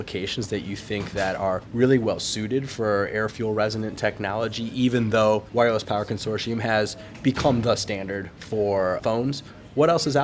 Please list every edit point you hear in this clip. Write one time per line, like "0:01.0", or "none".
0:01.7
0:05.5
0:09.0